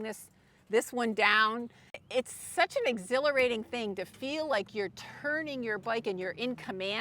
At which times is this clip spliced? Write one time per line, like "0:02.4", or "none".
0:02.0